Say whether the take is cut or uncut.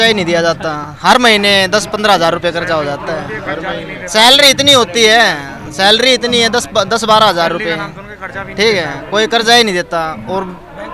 uncut